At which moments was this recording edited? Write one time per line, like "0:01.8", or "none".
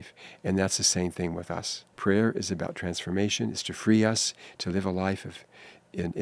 0:02.0